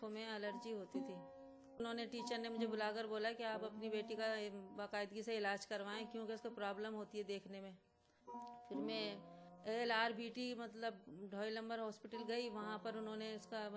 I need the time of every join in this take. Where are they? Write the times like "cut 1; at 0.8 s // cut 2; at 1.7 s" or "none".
cut 1; at 1.8 s

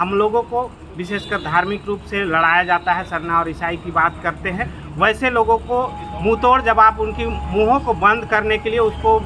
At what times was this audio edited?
none

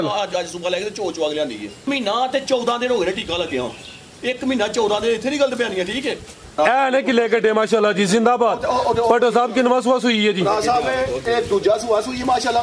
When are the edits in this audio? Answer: cut 1; at 1.8 s // cut 2; at 6.4 s

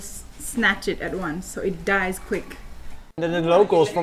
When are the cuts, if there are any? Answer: cut 1; at 3.0 s

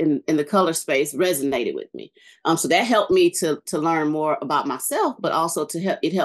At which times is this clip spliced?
none

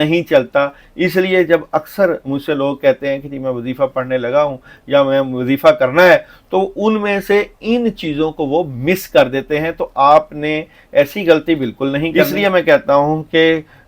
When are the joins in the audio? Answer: cut 1; at 12.2 s

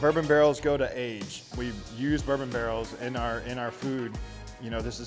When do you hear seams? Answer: cut 1; at 1.4 s

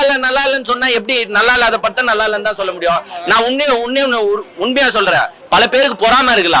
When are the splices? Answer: none

